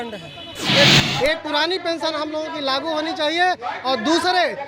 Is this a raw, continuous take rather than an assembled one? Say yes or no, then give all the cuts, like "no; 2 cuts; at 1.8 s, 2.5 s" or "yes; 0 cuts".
no; 1 cut; at 0.9 s